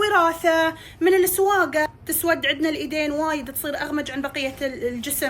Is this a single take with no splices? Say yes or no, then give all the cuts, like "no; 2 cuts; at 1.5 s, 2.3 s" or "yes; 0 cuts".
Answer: no; 1 cut; at 2.0 s